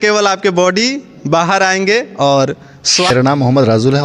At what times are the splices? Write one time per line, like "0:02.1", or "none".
0:03.1